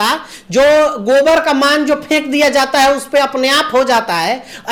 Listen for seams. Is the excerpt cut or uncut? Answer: uncut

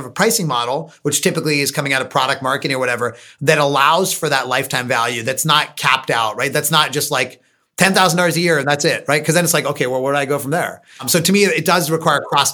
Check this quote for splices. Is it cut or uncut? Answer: cut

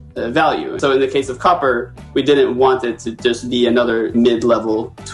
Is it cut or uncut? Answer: cut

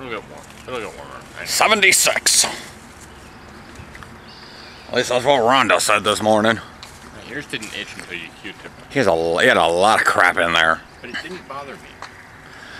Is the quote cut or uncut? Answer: cut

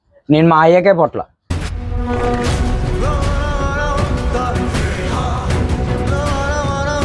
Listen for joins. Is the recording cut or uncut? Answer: uncut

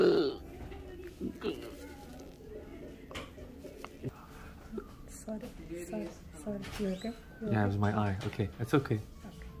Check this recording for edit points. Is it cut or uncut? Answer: cut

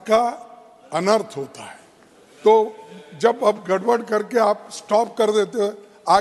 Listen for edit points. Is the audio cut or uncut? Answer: uncut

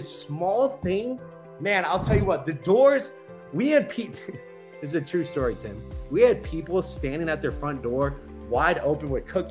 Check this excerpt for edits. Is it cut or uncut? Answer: uncut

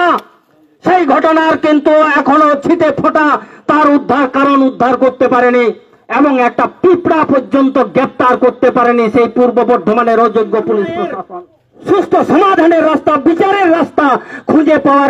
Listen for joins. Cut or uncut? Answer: cut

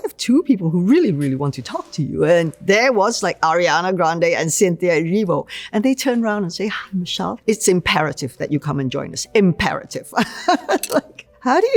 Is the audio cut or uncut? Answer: uncut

